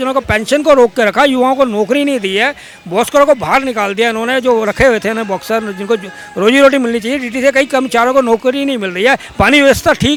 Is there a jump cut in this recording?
no; 0 cuts

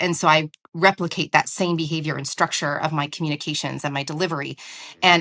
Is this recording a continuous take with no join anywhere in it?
yes; 0 cuts

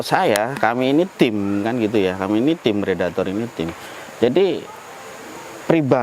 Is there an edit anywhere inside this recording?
no; 0 cuts

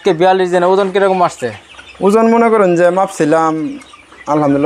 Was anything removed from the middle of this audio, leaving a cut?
no; 0 cuts

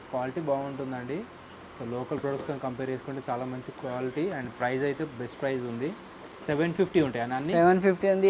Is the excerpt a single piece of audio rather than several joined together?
yes; 0 cuts

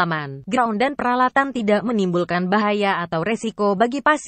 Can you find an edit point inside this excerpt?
no; 0 cuts

